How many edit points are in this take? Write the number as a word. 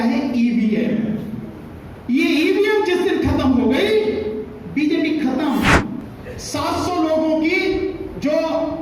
one